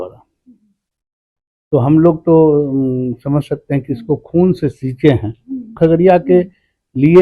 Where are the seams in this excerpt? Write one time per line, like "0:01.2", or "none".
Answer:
0:05.7